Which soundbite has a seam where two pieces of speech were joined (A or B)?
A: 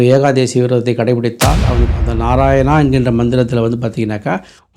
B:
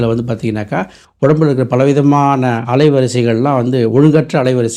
A